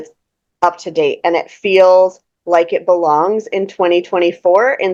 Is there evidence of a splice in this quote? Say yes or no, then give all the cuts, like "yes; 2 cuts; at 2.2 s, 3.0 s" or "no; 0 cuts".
no; 0 cuts